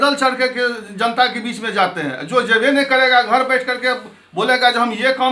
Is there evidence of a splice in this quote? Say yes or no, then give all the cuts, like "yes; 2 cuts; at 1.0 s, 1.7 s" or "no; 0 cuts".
no; 0 cuts